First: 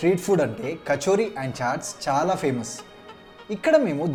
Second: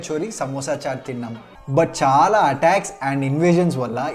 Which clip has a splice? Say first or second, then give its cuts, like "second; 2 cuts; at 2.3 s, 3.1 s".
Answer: second; 1 cut; at 1.5 s